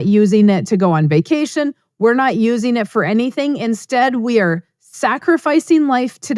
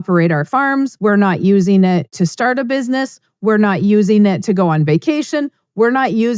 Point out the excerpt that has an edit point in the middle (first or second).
second